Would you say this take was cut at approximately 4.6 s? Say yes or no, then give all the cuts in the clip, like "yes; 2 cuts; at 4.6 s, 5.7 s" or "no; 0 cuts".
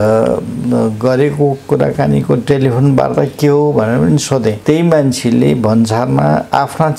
yes; 1 cut; at 4.6 s